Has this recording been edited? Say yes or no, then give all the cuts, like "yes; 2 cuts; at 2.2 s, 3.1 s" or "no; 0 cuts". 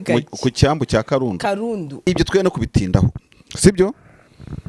yes; 1 cut; at 2.0 s